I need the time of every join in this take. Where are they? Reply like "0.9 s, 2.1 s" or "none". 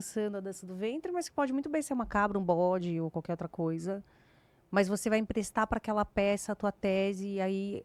none